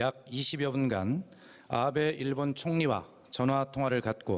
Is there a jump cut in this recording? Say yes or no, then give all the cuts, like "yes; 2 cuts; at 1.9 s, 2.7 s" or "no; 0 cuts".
yes; 1 cut; at 3.4 s